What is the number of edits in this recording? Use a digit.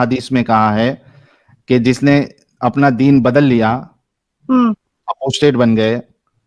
0